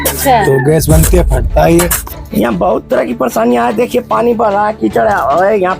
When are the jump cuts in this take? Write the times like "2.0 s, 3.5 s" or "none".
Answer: 2.2 s